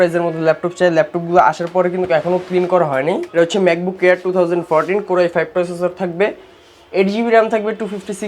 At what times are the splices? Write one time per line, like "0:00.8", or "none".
0:03.3